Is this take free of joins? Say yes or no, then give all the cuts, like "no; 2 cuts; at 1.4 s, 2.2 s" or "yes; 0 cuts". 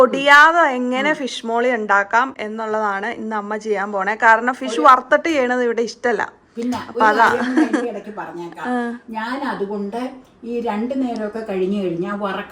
yes; 0 cuts